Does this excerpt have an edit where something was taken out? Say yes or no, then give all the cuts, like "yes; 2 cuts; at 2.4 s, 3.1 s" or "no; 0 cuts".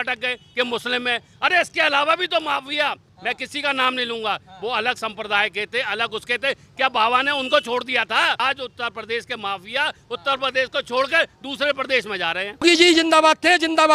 yes; 2 cuts; at 8.4 s, 12.6 s